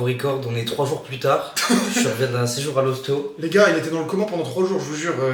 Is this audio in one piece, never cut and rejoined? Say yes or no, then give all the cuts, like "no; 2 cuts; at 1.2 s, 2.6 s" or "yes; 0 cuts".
yes; 0 cuts